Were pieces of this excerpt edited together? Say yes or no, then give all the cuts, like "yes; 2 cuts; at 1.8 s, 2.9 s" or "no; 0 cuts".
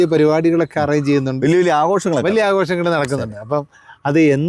no; 0 cuts